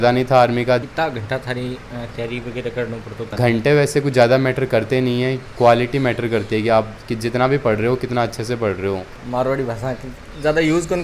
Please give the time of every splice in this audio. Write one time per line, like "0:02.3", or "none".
0:00.8
0:03.3
0:05.4
0:09.2